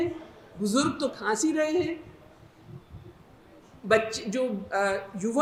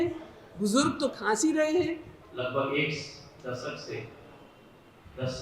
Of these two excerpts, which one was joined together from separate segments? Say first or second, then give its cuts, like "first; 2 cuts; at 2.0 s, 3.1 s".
second; 1 cut; at 2.2 s